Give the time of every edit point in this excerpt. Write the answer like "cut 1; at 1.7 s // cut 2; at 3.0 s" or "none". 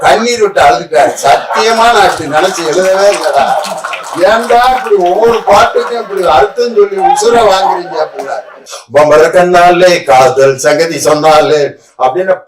cut 1; at 8.7 s

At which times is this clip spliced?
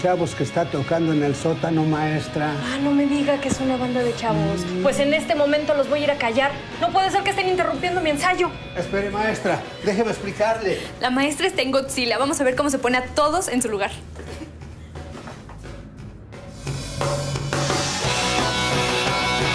none

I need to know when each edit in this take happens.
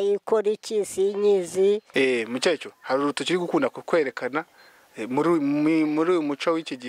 cut 1; at 1.9 s

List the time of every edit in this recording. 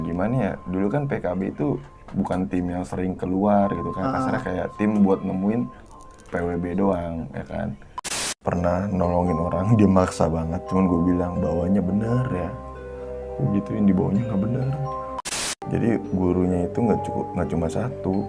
cut 1; at 8.2 s // cut 2; at 15.2 s

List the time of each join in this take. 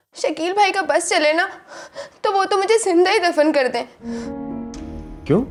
none

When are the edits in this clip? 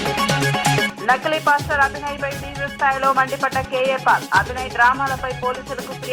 cut 1; at 0.9 s

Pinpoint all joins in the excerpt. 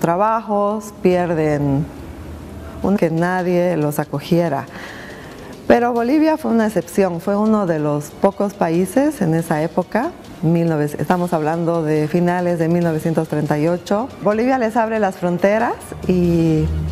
none

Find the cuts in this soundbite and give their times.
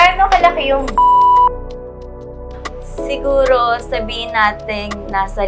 none

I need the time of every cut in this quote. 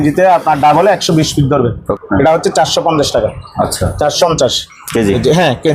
cut 1; at 1.9 s // cut 2; at 4.2 s

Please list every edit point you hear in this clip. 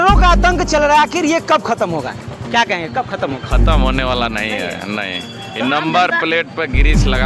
none

